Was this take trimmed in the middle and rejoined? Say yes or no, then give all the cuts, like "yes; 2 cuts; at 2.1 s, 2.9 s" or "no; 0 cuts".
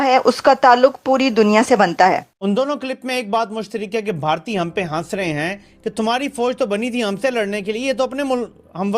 yes; 1 cut; at 2.3 s